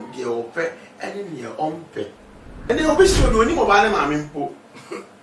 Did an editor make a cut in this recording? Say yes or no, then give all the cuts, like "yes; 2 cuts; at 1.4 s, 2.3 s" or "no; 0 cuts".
yes; 1 cut; at 2.7 s